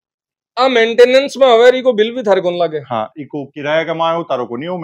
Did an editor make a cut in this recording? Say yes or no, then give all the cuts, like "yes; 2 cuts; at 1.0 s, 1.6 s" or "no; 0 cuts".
no; 0 cuts